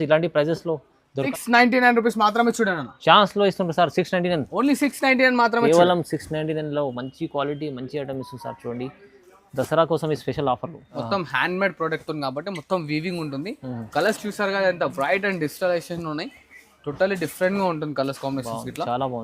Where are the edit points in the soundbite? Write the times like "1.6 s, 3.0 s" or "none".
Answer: 1.3 s, 10.8 s